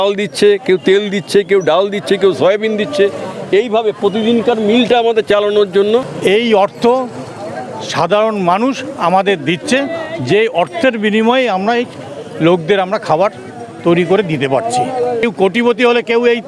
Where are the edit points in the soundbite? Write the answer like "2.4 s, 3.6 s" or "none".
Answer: 6.1 s, 15.2 s